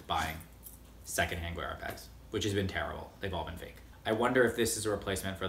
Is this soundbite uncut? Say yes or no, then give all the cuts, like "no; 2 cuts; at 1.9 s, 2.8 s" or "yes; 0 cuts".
no; 2 cuts; at 1.0 s, 4.0 s